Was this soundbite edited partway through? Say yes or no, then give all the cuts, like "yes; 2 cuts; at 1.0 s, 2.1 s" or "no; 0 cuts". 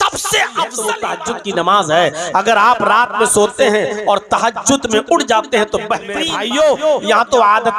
yes; 2 cuts; at 1.0 s, 6.3 s